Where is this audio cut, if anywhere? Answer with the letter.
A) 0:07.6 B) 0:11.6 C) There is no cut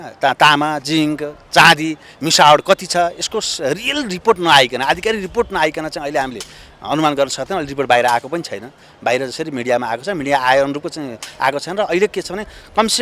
C